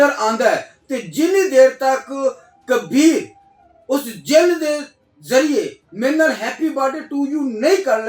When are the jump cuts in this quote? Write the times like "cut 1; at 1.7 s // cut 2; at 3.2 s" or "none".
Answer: none

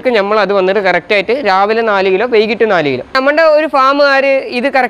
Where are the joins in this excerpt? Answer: cut 1; at 3.2 s

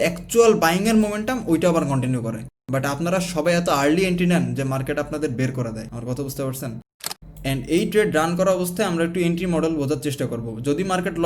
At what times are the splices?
cut 1; at 7.0 s

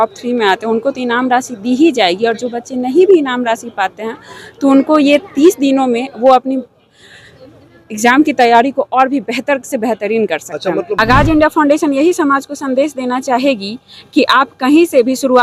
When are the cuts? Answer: cut 1; at 11.0 s

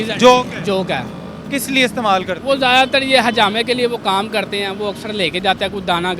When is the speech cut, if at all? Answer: none

